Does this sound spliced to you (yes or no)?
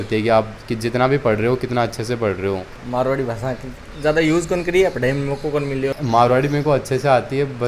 yes